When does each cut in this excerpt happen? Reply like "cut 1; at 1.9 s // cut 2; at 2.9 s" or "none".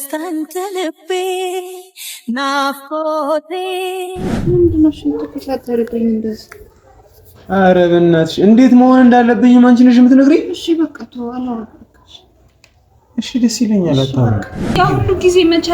cut 1; at 4.4 s // cut 2; at 14.7 s